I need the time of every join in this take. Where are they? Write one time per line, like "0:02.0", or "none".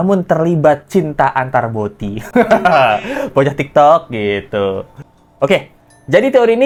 none